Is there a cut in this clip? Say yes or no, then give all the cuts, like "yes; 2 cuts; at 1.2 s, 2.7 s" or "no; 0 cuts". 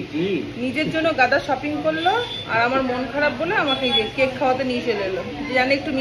no; 0 cuts